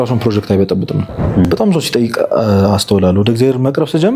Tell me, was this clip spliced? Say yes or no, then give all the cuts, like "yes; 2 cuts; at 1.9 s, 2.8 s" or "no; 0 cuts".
yes; 1 cut; at 1.4 s